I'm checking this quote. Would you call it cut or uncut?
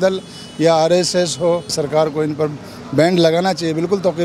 cut